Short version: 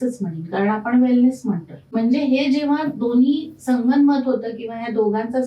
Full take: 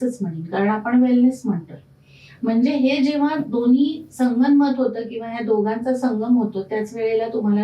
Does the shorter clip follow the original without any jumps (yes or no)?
no